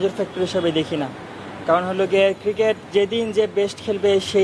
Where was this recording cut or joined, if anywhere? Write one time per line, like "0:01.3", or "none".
none